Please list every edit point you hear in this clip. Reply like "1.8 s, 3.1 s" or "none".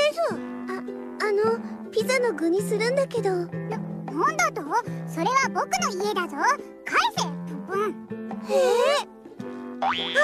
none